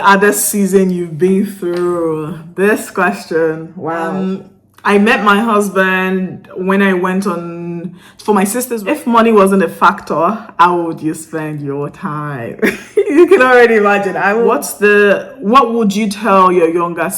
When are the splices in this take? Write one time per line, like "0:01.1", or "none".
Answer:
0:04.1
0:08.7
0:14.6